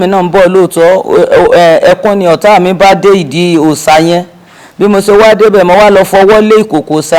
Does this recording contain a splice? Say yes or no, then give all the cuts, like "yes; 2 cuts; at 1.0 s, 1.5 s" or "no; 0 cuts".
no; 0 cuts